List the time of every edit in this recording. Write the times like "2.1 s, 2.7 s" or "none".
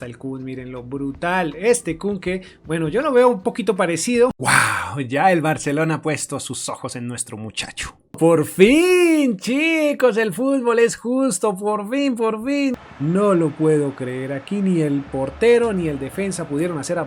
4.4 s, 8.2 s, 12.8 s